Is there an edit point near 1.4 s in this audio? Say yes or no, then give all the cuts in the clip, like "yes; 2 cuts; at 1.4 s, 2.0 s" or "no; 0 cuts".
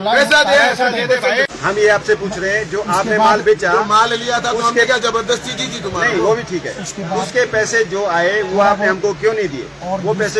yes; 1 cut; at 1.4 s